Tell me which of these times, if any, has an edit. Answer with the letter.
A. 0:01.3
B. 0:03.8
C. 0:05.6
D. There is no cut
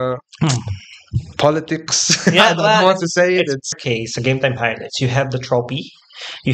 B